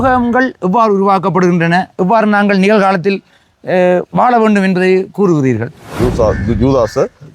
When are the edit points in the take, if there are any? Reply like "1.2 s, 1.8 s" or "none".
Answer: 5.9 s